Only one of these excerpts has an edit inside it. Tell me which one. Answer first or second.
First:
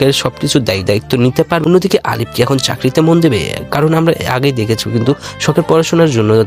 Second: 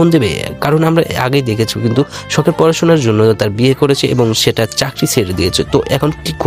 first